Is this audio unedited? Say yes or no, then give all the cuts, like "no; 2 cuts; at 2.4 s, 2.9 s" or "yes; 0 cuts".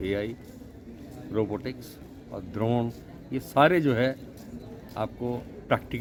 yes; 0 cuts